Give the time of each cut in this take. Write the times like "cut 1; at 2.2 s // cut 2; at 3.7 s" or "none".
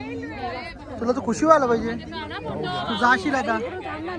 none